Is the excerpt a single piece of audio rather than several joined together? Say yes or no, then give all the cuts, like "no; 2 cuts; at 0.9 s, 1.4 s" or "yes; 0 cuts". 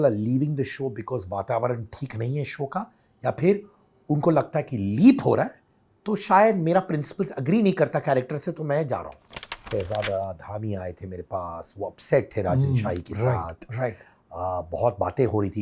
no; 1 cut; at 9.6 s